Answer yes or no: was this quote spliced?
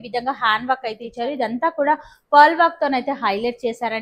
yes